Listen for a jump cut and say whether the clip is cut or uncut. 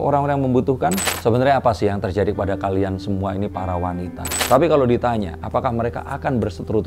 cut